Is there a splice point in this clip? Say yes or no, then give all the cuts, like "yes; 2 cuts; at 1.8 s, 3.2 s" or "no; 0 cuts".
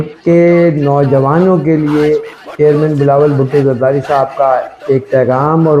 no; 0 cuts